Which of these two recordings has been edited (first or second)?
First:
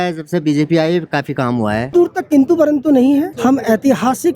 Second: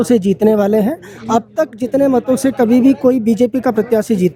first